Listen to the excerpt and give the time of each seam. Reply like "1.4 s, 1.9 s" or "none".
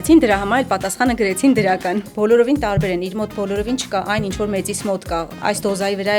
2.1 s, 5.4 s